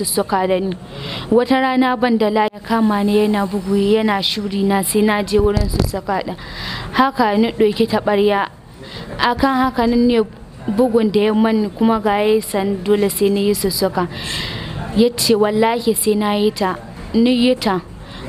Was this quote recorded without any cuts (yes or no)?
no